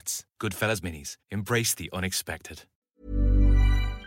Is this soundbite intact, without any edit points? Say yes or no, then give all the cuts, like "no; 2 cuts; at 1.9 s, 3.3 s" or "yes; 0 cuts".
no; 1 cut; at 2.8 s